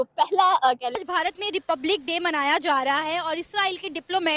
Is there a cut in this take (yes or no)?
yes